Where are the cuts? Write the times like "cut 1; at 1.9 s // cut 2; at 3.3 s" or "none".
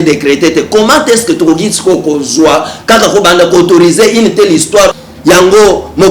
cut 1; at 4.9 s